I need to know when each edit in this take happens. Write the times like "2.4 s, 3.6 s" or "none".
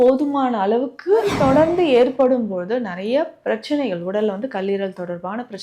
1.3 s

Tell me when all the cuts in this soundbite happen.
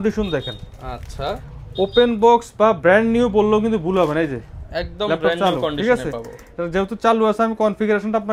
none

